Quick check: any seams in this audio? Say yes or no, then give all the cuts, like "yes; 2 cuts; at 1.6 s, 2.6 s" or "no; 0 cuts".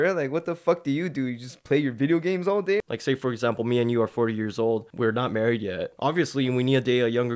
yes; 3 cuts; at 2.8 s, 4.9 s, 5.9 s